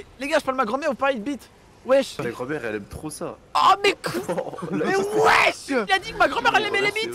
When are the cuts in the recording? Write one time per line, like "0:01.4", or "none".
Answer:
0:02.2
0:05.8

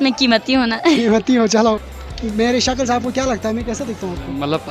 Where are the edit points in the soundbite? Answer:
0:01.9

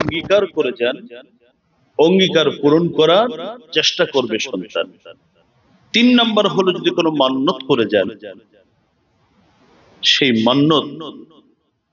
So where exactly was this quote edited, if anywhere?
none

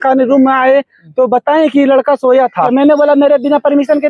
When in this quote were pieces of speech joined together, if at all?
0:02.7

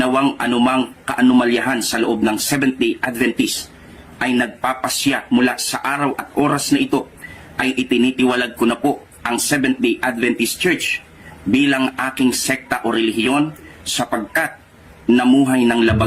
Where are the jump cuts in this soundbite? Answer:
0:13.6

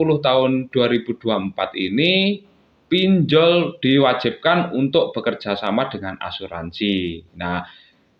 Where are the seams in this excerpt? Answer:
none

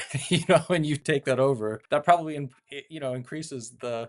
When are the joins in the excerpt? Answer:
0:01.0
0:01.8

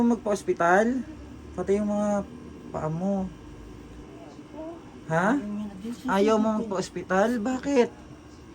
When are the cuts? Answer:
0:04.0

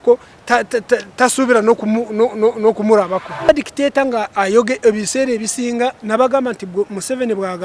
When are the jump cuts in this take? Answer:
0:03.5
0:06.0

